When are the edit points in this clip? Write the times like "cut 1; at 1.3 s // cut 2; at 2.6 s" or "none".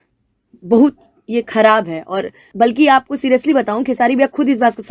cut 1; at 2.5 s